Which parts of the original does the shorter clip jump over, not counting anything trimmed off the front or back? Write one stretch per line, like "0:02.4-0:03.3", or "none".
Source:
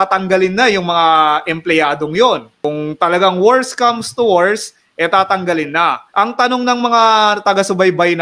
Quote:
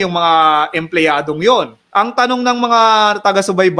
0:02.5-0:06.0

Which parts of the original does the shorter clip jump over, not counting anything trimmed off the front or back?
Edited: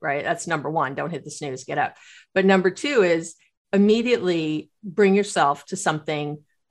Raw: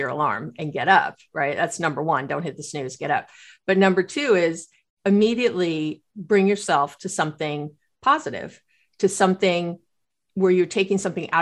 none

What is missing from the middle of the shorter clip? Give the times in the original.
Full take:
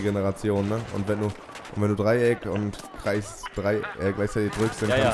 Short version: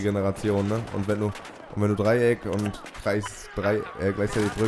none

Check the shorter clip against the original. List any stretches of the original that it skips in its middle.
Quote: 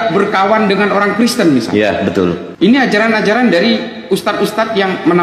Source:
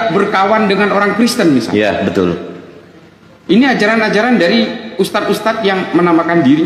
0:02.5-0:03.3

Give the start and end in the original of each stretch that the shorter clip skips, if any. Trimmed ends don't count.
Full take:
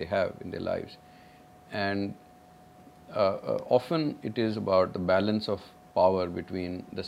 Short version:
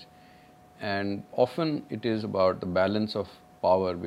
0:02.2-0:03.6

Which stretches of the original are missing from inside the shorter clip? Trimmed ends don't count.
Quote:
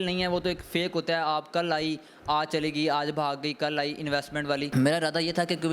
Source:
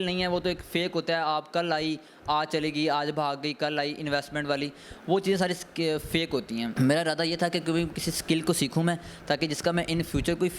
0:04.7-0:06.7

